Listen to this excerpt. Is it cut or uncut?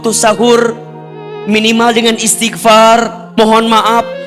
cut